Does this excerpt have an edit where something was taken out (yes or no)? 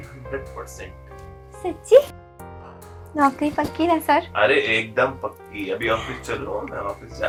no